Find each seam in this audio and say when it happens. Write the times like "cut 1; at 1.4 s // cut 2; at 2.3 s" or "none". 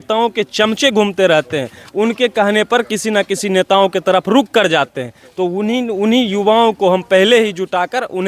none